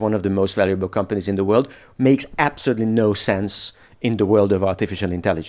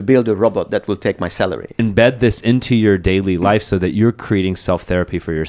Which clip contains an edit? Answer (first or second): second